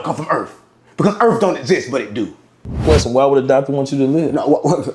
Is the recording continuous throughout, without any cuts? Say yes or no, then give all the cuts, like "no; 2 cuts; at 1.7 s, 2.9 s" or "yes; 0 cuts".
no; 1 cut; at 2.8 s